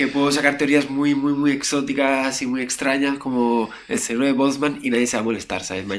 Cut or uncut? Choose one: uncut